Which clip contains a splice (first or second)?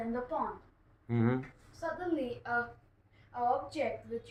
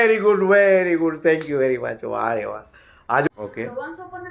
second